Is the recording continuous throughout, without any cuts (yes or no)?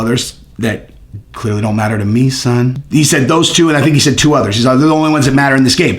no